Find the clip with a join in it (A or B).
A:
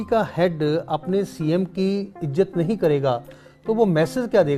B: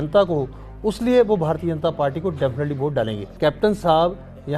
B